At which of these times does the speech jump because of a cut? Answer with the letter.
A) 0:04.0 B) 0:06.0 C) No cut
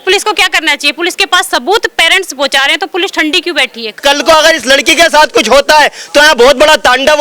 A